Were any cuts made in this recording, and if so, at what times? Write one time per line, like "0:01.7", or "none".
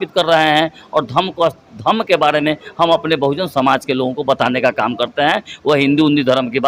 none